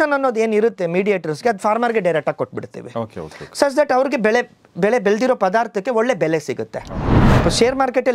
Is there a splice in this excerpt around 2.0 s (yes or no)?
no